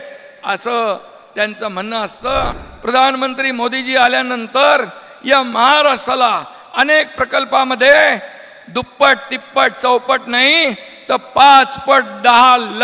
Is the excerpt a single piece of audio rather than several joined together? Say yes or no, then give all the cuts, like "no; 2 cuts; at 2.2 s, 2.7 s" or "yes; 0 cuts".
no; 1 cut; at 2.6 s